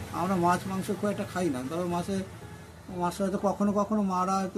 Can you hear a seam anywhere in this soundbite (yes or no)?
no